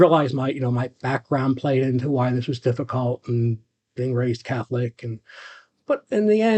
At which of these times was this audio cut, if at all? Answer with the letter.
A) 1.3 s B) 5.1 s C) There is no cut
C